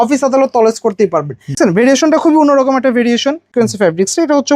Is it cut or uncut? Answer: cut